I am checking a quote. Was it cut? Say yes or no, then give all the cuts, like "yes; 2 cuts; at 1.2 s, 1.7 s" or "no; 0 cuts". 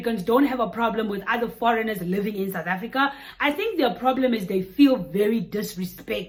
no; 0 cuts